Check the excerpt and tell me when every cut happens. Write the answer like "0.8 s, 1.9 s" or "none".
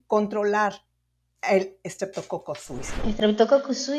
2.9 s